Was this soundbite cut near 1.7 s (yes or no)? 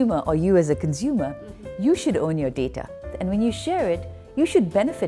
no